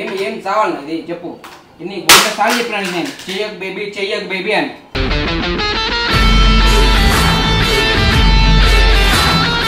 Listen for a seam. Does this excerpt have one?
no; 0 cuts

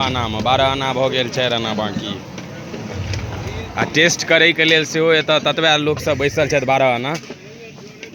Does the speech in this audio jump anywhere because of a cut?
no; 0 cuts

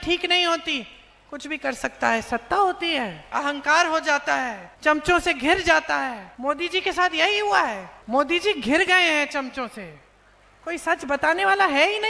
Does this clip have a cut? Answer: yes; 4 cuts; at 3.3 s, 4.6 s, 6.2 s, 7.9 s

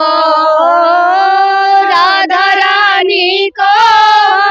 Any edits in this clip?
no; 0 cuts

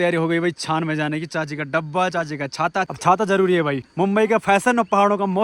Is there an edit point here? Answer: yes; 2 cuts; at 2.9 s, 3.8 s

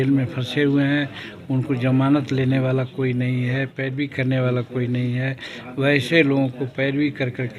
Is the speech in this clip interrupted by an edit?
no; 0 cuts

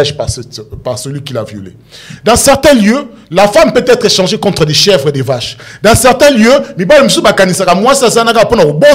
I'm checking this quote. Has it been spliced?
no; 0 cuts

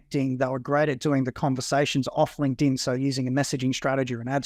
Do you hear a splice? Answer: no; 0 cuts

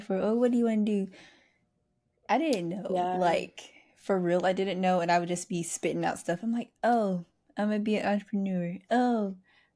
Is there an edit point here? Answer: no; 0 cuts

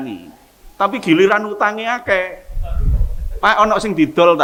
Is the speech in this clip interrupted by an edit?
no; 0 cuts

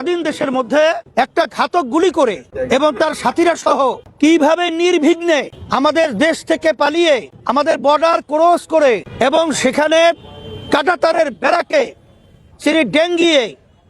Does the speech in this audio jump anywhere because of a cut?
yes; 6 cuts; at 1.0 s, 2.5 s, 4.0 s, 5.6 s, 7.3 s, 9.1 s

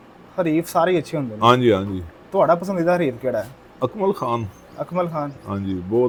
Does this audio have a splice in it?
no; 0 cuts

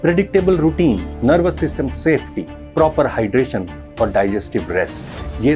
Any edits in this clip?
yes; 1 cut; at 1.1 s

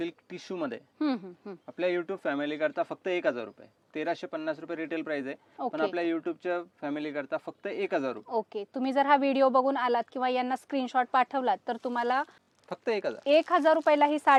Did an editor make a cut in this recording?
no; 0 cuts

